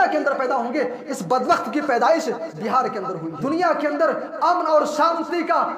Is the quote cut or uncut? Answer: cut